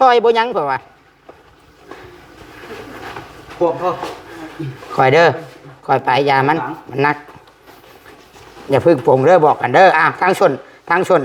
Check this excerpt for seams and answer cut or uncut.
uncut